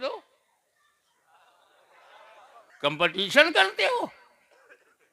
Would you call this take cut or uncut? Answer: cut